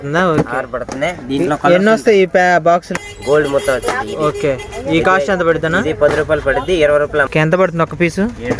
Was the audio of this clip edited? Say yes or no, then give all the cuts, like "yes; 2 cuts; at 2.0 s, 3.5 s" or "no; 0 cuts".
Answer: yes; 2 cuts; at 2.9 s, 7.3 s